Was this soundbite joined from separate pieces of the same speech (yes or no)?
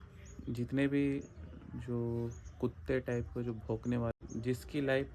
yes